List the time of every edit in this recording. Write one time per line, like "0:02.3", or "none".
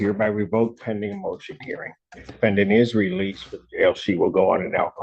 none